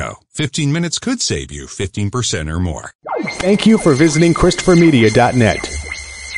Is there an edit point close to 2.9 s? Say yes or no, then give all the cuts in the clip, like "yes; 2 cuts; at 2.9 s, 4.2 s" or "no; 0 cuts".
yes; 1 cut; at 2.9 s